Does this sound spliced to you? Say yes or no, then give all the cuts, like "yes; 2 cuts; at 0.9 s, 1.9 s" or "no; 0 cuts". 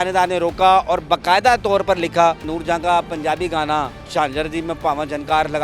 yes; 2 cuts; at 2.5 s, 4.1 s